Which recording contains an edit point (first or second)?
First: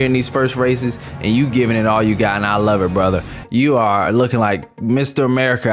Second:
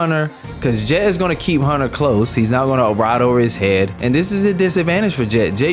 second